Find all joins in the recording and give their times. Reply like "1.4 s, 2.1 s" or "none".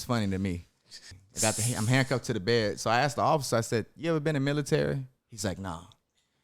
1.1 s